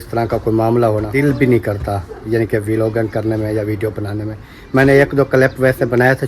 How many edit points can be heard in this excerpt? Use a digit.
1